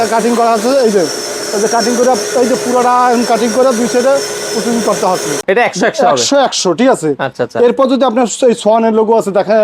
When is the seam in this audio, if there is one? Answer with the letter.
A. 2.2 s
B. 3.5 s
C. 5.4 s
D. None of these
C